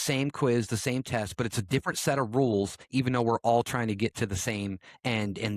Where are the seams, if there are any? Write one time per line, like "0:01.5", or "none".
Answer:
none